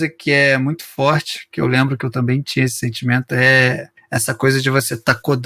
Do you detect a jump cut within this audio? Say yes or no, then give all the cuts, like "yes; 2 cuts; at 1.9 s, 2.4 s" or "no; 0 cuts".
no; 0 cuts